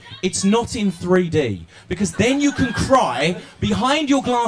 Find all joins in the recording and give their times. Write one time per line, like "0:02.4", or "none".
0:02.3